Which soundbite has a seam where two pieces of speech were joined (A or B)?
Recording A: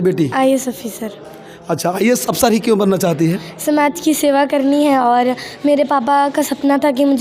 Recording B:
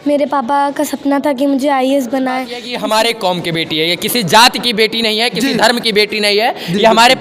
B